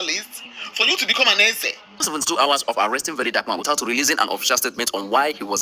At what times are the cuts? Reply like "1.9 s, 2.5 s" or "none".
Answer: 2.1 s